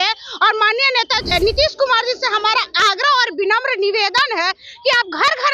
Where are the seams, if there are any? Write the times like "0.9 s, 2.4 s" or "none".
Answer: 1.3 s